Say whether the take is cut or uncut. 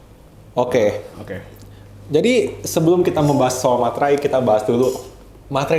uncut